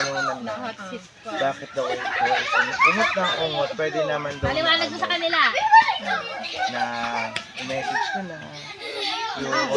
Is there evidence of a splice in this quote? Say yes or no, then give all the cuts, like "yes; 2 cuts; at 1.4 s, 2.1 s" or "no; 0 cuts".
no; 0 cuts